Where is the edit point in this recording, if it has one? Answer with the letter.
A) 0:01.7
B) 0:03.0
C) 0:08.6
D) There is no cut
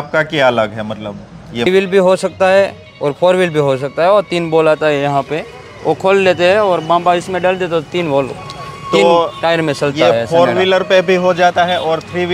A